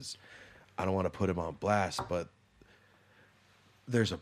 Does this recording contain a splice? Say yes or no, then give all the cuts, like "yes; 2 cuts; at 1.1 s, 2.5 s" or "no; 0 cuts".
no; 0 cuts